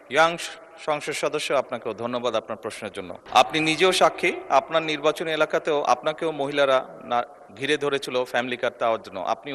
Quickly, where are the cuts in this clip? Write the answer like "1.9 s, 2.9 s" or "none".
3.2 s